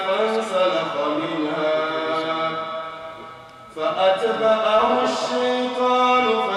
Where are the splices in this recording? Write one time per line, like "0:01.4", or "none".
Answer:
none

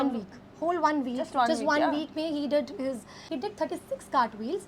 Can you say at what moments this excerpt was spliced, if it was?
0:03.2

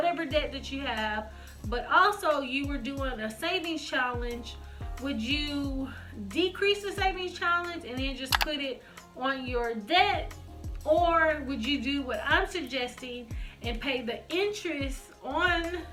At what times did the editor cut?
none

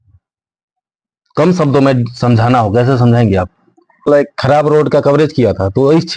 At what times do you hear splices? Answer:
0:04.1

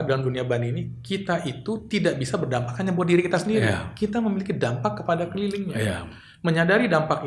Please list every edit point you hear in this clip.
none

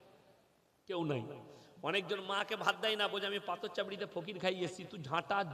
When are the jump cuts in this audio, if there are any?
none

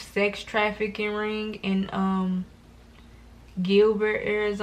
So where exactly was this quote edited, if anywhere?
none

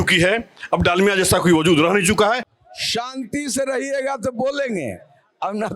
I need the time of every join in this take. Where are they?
0:02.6

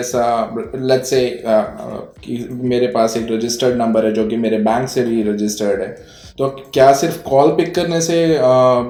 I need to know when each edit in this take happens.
none

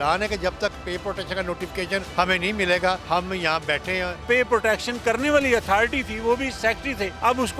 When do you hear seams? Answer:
0:02.1
0:03.0
0:04.2
0:06.8

